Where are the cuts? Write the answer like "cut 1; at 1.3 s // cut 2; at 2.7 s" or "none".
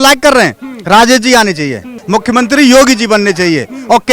cut 1; at 2.0 s